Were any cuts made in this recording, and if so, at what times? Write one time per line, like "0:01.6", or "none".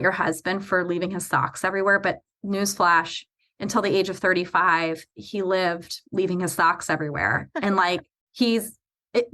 0:08.2